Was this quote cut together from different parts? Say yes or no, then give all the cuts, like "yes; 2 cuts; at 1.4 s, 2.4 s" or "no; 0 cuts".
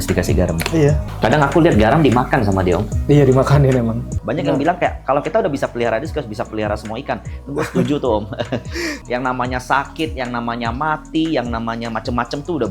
yes; 3 cuts; at 1.1 s, 4.2 s, 9.0 s